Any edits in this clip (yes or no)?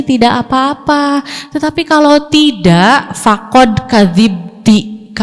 no